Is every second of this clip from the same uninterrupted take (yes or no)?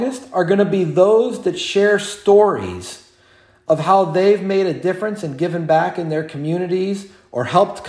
yes